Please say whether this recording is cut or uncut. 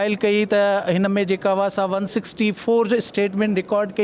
uncut